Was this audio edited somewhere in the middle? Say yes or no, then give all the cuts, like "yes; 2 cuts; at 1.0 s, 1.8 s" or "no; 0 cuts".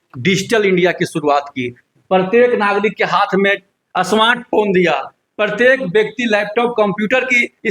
no; 0 cuts